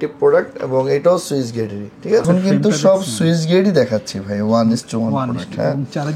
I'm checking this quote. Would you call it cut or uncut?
cut